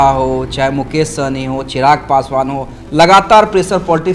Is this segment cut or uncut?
uncut